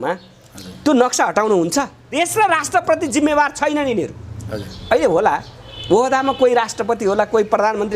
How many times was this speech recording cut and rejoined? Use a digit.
1